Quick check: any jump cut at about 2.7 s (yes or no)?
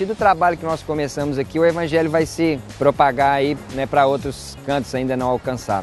yes